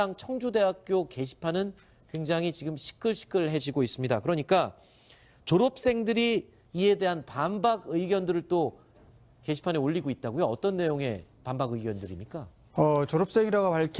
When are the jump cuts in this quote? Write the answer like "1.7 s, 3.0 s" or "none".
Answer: none